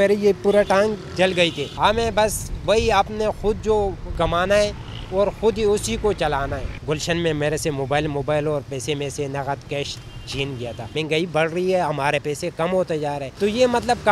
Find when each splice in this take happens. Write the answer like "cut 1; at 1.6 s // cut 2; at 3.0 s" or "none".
cut 1; at 1.7 s // cut 2; at 4.0 s // cut 3; at 6.7 s // cut 4; at 10.9 s // cut 5; at 13.3 s